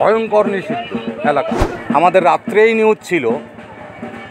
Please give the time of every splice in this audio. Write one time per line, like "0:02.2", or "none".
0:01.7

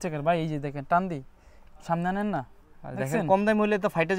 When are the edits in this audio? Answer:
none

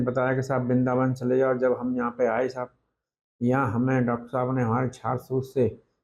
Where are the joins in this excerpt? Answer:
none

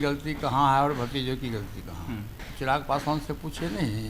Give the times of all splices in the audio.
none

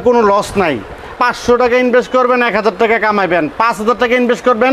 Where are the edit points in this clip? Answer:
0:01.2

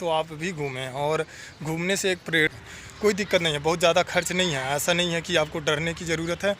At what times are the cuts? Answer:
0:02.5

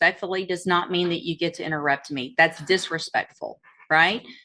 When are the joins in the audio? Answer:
none

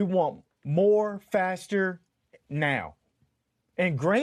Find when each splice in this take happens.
none

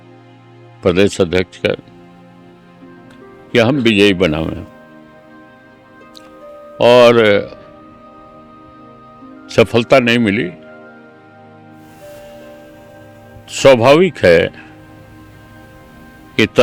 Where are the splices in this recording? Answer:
0:04.7
0:06.8

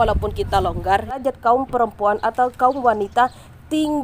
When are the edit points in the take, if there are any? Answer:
0:01.2

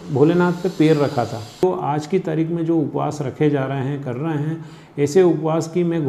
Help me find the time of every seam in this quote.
0:01.6

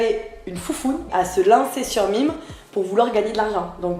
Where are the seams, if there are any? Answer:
0:01.1

